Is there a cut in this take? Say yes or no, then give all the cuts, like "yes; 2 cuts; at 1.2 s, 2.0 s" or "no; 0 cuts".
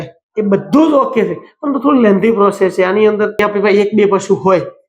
yes; 1 cut; at 3.4 s